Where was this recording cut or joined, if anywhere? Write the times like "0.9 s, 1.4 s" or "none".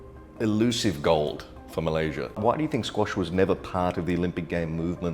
2.4 s